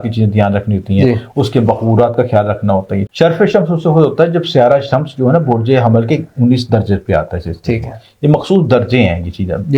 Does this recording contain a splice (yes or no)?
yes